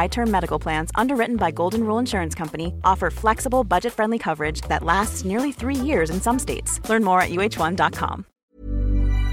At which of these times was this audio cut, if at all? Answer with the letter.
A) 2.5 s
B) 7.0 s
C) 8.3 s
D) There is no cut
C